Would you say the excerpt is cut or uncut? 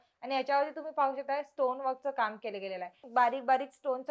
cut